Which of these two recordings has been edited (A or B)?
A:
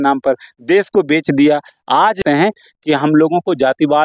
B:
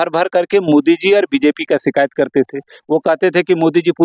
A